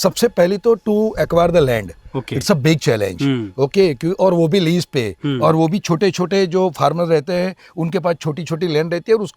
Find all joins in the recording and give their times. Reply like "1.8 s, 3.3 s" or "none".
none